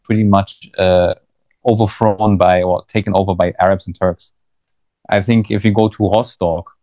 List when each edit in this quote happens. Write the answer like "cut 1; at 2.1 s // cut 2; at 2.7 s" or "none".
none